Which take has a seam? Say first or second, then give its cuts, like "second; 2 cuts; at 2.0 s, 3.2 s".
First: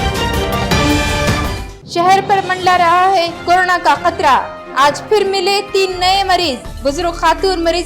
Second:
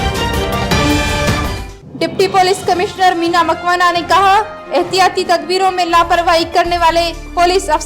second; 1 cut; at 1.5 s